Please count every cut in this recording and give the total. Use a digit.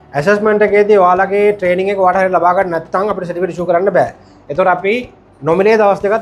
0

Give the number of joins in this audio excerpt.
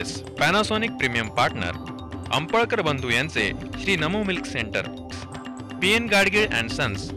0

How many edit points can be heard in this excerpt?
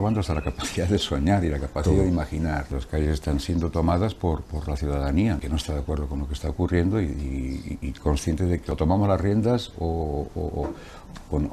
3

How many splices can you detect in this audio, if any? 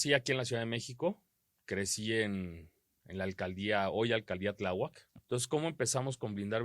1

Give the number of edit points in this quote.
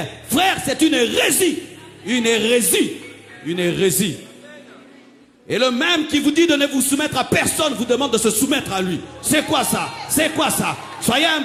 0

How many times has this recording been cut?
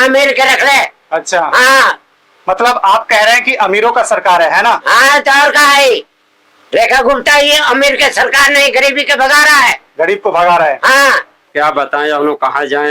1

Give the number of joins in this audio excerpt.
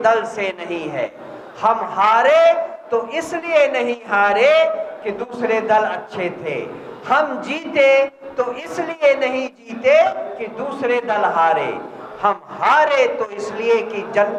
0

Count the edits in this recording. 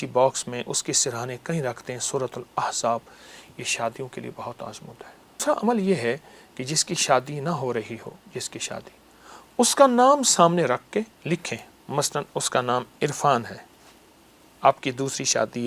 1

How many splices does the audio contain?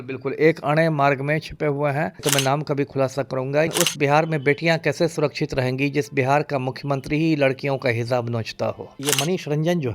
3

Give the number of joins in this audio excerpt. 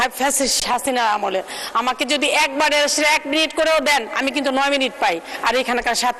0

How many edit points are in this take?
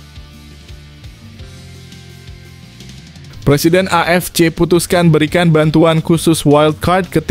1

